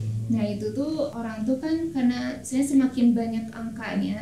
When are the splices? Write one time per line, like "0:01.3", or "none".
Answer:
0:01.2